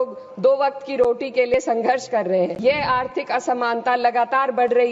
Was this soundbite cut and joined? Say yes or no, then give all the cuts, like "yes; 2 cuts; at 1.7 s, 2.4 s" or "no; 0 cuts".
yes; 1 cut; at 2.6 s